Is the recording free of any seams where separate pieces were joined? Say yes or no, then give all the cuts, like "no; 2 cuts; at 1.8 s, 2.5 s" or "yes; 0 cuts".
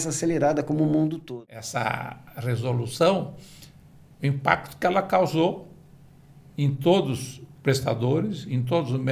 no; 1 cut; at 1.3 s